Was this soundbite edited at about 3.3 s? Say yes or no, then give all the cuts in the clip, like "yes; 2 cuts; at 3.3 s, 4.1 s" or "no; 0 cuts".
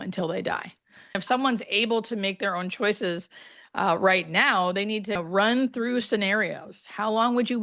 no; 2 cuts; at 1.1 s, 5.2 s